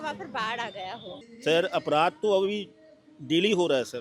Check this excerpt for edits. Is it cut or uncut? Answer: cut